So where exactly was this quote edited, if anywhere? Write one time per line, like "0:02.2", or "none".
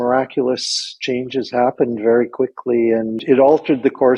0:03.2